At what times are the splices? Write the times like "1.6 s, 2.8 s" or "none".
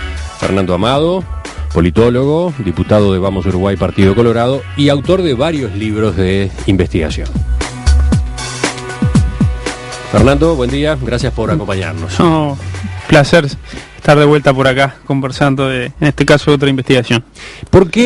9.7 s